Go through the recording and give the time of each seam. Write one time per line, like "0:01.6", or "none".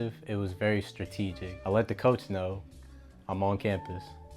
0:01.5